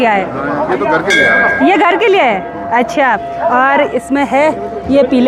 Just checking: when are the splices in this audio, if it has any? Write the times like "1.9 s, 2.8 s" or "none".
none